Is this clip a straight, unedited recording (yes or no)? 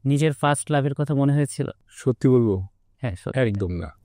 no